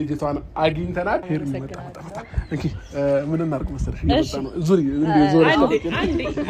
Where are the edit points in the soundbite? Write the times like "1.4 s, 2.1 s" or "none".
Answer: 1.2 s